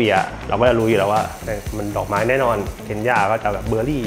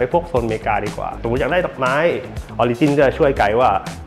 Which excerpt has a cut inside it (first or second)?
second